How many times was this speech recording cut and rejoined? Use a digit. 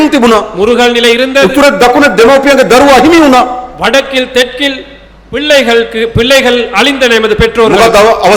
0